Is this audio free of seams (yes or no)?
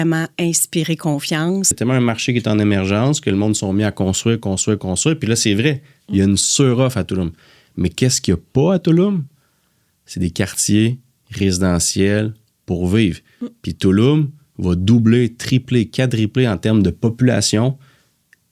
no